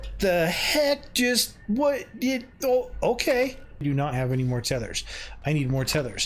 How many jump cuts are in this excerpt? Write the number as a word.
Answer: one